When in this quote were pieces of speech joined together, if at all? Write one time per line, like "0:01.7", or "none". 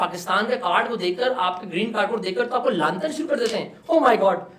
none